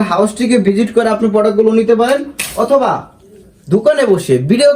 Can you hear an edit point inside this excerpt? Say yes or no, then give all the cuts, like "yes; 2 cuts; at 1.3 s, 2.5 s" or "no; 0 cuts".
no; 0 cuts